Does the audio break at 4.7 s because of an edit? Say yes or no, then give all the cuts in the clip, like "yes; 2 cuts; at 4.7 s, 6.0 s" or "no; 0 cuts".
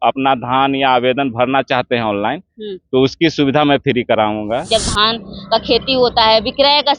yes; 1 cut; at 4.7 s